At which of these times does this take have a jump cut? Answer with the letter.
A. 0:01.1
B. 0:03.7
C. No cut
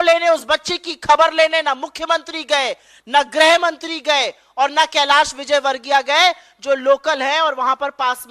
C